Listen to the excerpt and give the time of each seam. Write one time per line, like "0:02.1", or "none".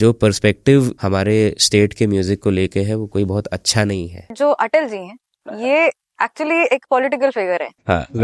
0:01.0
0:04.3